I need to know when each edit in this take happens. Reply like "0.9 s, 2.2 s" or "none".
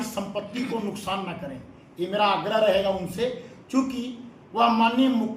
none